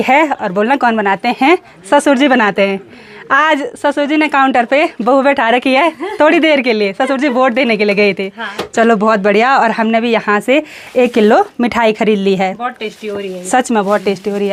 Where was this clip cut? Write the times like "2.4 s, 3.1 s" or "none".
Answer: none